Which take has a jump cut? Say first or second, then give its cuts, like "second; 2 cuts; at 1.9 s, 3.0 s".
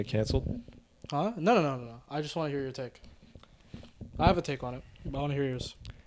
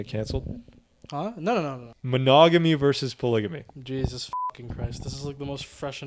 second; 1 cut; at 1.9 s